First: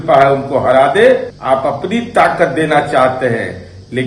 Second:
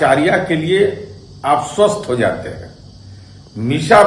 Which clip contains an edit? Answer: first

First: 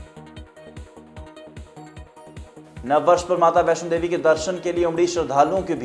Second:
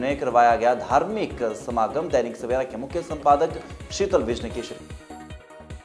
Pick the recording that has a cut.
first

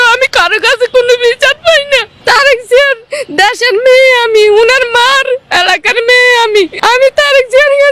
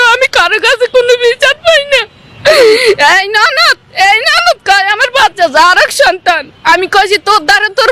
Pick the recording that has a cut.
first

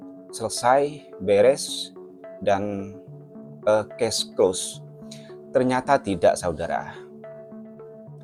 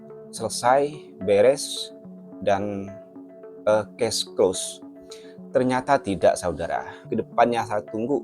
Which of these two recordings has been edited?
second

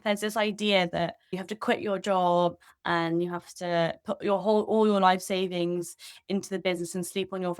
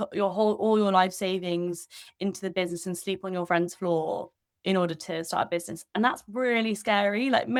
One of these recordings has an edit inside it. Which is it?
first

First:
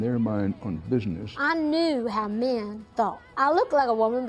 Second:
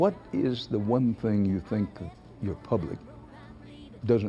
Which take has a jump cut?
first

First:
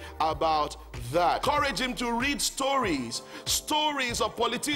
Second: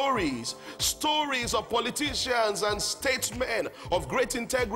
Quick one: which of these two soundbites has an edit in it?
first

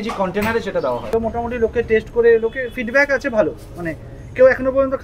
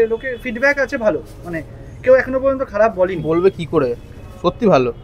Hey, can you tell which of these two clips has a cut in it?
first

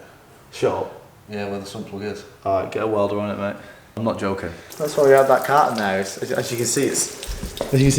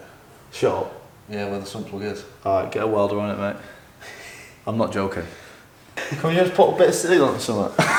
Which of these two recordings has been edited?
first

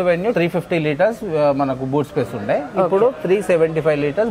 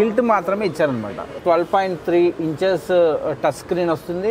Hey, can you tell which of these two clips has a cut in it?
second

